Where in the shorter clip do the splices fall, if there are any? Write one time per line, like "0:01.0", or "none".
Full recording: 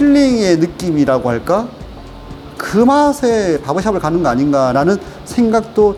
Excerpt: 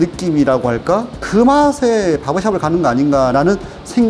0:01.2